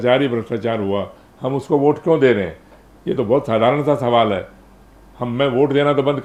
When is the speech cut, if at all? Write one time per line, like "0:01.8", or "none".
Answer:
none